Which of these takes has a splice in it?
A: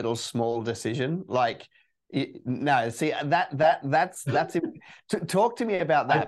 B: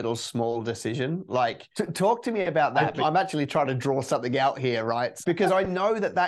B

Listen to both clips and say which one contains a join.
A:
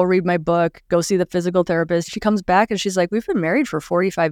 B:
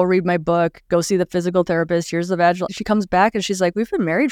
A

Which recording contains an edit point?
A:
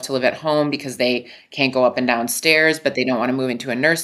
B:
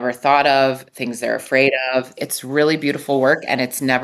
B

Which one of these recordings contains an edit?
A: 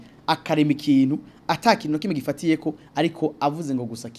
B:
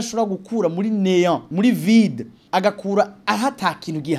B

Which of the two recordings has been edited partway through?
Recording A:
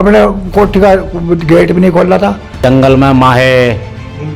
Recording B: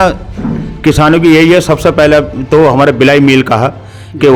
A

